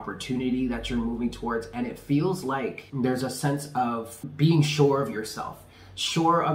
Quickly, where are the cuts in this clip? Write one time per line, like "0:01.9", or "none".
0:02.8
0:04.2